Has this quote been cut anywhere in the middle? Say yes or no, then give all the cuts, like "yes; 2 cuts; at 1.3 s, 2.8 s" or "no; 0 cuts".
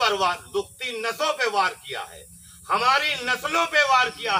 no; 0 cuts